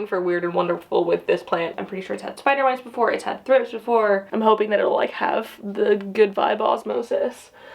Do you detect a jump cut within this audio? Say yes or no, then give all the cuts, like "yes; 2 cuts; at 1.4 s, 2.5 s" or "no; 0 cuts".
yes; 2 cuts; at 1.7 s, 4.6 s